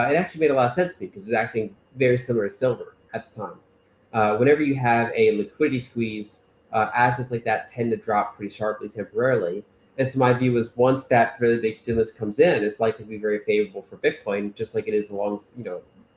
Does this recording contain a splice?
no; 0 cuts

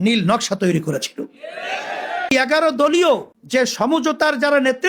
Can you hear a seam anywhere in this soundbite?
yes; 2 cuts; at 2.3 s, 3.3 s

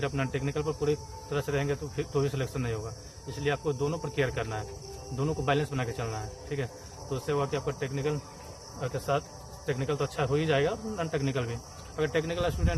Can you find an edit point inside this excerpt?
no; 0 cuts

